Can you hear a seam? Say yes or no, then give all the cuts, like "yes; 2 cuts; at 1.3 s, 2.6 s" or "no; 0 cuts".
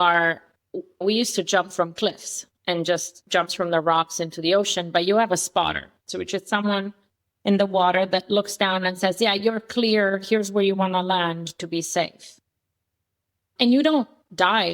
yes; 2 cuts; at 1.0 s, 13.5 s